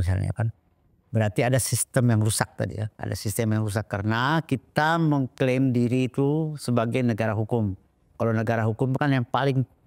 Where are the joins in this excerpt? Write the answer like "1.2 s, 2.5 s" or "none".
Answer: none